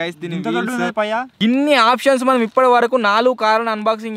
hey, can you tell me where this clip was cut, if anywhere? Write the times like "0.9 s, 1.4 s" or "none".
1.3 s